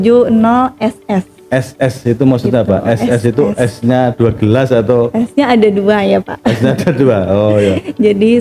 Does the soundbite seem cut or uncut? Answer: uncut